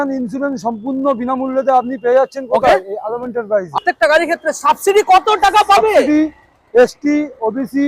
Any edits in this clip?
yes; 1 cut; at 3.8 s

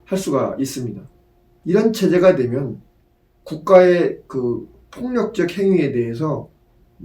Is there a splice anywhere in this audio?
yes; 1 cut; at 1.6 s

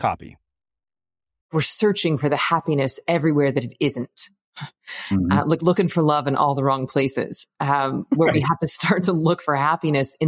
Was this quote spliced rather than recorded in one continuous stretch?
yes; 1 cut; at 1.5 s

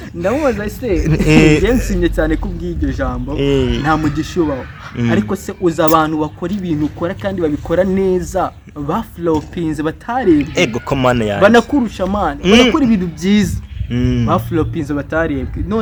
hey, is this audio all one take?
yes; 0 cuts

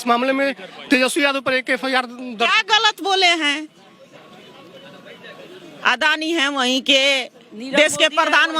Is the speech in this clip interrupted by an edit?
no; 0 cuts

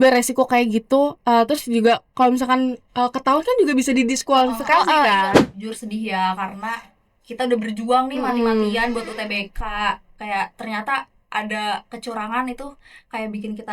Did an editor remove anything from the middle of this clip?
yes; 1 cut; at 5.4 s

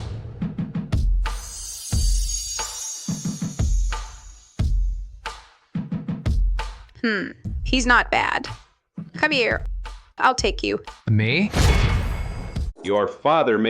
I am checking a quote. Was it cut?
yes; 1 cut; at 12.8 s

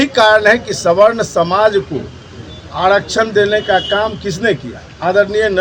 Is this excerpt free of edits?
yes; 0 cuts

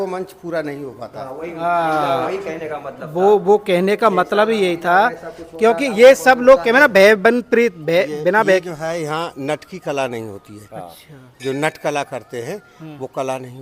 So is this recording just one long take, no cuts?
yes; 0 cuts

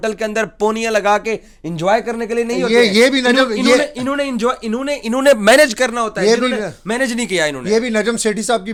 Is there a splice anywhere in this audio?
no; 0 cuts

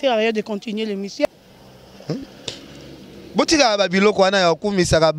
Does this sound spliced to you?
yes; 1 cut; at 1.2 s

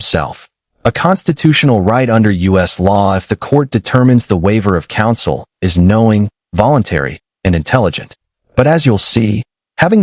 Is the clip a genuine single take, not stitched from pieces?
yes; 0 cuts

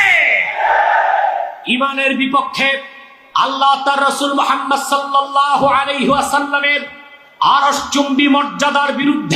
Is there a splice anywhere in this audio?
yes; 1 cut; at 1.5 s

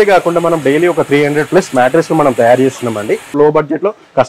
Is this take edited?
yes; 1 cut; at 3.3 s

